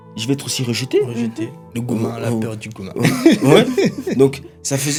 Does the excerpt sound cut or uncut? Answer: uncut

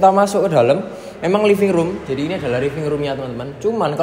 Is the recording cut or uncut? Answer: uncut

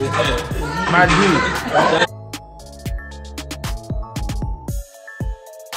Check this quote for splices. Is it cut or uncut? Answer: uncut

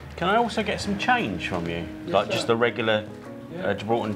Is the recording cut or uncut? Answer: uncut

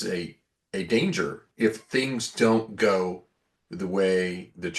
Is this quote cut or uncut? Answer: cut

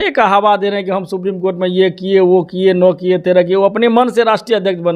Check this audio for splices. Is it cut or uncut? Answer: uncut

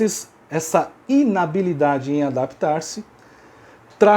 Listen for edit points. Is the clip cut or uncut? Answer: cut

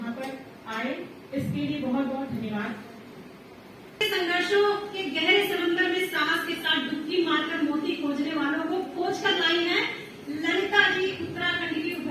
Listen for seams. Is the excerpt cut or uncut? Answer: cut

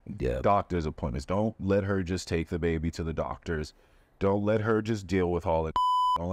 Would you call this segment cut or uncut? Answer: uncut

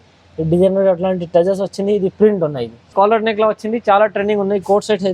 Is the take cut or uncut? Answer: cut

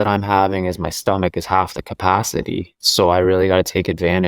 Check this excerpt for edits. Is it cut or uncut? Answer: cut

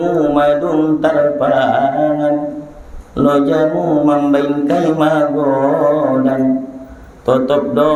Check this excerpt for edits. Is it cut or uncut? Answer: uncut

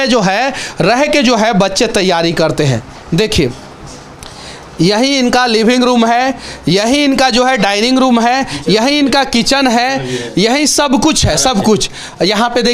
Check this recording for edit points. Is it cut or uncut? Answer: uncut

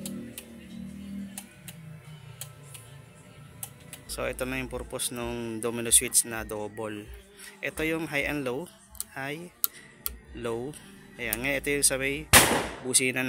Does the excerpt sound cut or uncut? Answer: cut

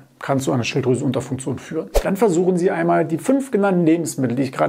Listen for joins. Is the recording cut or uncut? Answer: cut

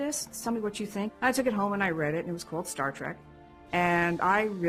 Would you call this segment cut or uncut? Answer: cut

